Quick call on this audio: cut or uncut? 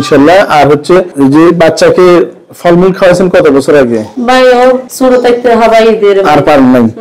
cut